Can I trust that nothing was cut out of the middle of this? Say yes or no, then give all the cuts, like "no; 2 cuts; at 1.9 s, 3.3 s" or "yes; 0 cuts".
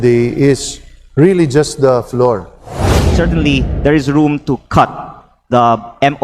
no; 1 cut; at 2.9 s